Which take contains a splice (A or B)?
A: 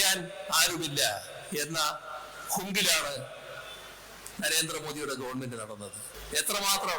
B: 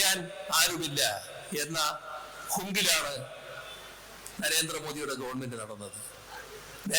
A